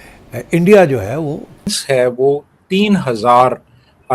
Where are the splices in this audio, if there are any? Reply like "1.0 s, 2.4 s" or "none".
1.8 s